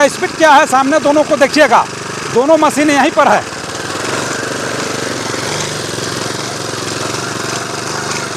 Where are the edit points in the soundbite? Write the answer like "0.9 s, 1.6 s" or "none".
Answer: none